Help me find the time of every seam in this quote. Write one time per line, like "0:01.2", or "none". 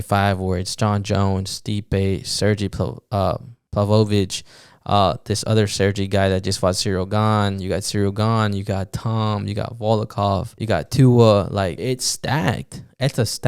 0:03.5
0:10.5
0:11.8